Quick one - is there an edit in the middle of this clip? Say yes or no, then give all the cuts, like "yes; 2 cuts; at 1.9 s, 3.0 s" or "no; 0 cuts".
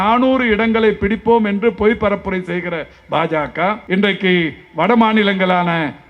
yes; 1 cut; at 3.8 s